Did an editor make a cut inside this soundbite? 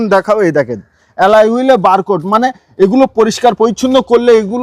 no; 0 cuts

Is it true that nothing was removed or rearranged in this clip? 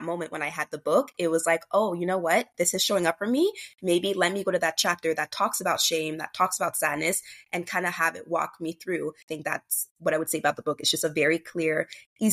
no; 1 cut; at 9.3 s

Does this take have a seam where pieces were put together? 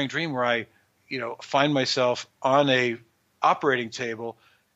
yes; 1 cut; at 1.0 s

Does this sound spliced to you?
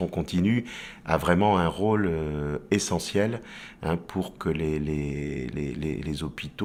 no; 0 cuts

